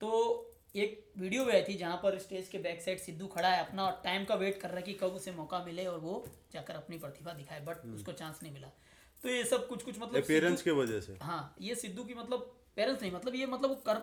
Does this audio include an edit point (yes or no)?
no